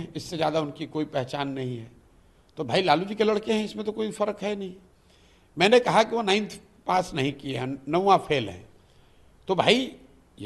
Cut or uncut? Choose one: uncut